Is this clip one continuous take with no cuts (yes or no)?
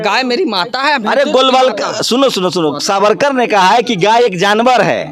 yes